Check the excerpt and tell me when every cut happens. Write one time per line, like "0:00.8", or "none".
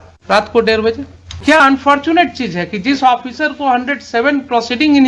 0:01.4